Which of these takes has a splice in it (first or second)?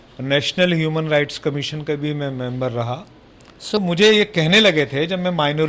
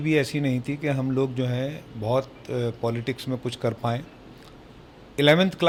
first